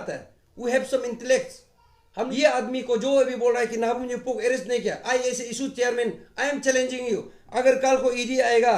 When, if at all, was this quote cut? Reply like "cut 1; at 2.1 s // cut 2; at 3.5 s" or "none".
cut 1; at 2.3 s